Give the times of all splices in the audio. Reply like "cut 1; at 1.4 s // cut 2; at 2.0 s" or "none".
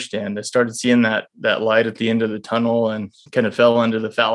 cut 1; at 3.2 s